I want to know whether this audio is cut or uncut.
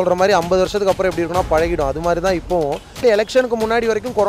cut